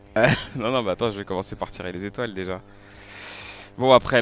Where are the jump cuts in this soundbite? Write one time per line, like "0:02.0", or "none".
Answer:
none